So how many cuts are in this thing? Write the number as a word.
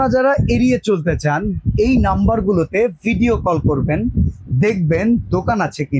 zero